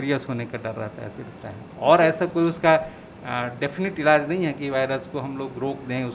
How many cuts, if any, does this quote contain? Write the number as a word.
one